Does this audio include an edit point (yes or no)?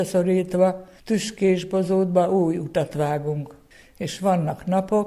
yes